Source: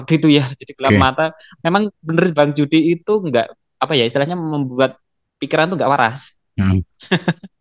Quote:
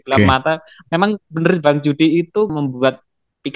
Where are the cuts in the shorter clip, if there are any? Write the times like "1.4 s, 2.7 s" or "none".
2.5 s